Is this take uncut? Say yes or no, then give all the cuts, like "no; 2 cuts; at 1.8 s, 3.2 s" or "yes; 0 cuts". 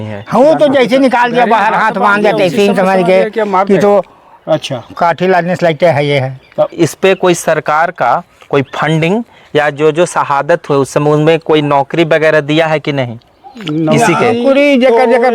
no; 1 cut; at 6.7 s